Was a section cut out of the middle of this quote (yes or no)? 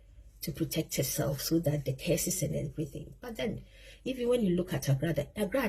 no